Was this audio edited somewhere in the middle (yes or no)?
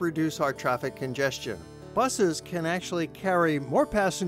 no